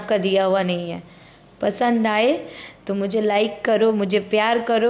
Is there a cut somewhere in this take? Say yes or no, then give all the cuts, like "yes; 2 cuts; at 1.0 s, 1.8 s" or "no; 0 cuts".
no; 0 cuts